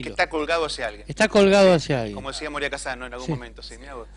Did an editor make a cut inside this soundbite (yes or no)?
yes